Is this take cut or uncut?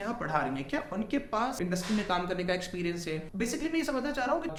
uncut